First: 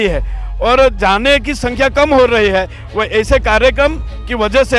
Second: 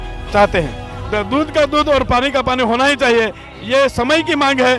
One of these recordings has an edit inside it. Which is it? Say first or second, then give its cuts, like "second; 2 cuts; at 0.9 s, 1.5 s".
second; 1 cut; at 0.9 s